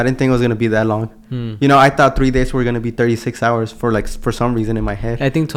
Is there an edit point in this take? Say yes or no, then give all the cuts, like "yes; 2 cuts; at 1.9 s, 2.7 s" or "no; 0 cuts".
no; 0 cuts